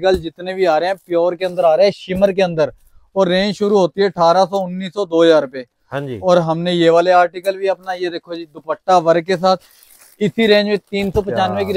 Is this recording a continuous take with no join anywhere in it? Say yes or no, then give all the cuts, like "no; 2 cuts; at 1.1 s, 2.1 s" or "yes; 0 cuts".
yes; 0 cuts